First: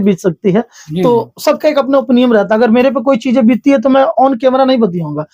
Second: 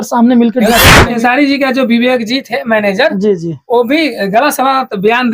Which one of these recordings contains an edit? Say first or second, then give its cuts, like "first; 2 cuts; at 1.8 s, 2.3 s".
second; 1 cut; at 1.1 s